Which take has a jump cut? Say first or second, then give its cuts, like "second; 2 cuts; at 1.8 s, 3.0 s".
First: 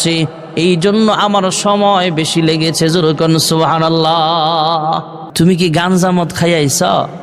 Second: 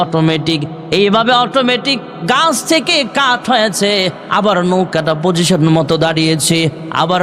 first; 1 cut; at 5.2 s